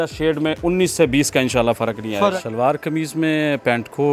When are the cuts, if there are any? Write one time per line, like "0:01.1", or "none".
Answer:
0:02.3